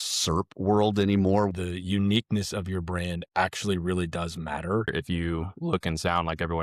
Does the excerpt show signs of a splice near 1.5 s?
yes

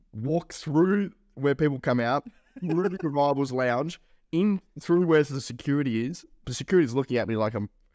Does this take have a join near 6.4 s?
yes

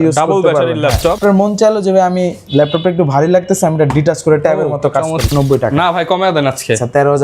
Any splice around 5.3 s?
yes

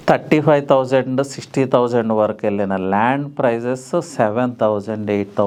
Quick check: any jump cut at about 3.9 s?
no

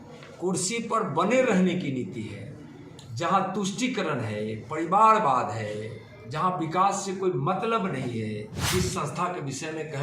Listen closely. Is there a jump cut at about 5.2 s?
no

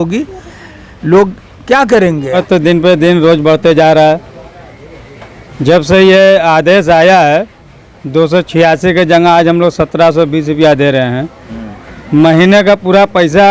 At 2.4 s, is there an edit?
yes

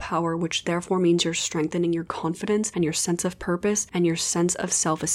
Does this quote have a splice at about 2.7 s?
yes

